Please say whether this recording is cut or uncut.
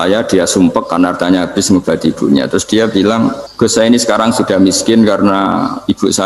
cut